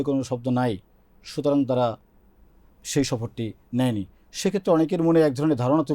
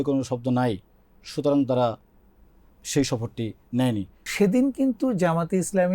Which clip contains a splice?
second; 1 cut; at 4.2 s

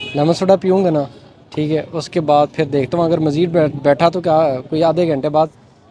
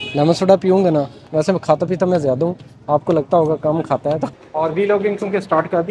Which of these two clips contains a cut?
second; 2 cuts; at 1.2 s, 4.4 s

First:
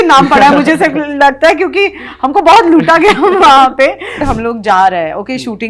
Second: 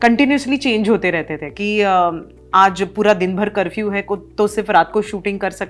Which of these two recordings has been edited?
first; 1 cut; at 4.2 s

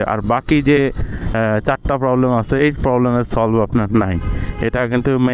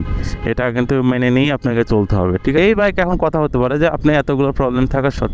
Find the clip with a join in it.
second; 1 cut; at 2.5 s

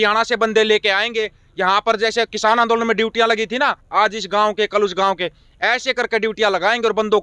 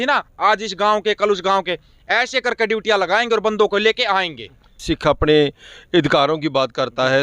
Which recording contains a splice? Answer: second; 1 cut; at 4.8 s

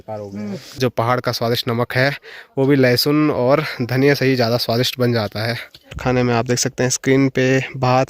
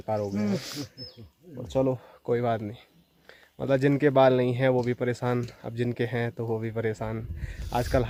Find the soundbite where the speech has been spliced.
first; 2 cuts; at 0.8 s, 6.0 s

